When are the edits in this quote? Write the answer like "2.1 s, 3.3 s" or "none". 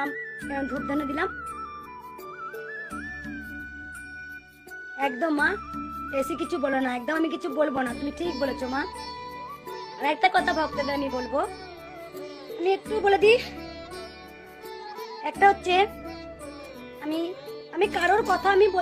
none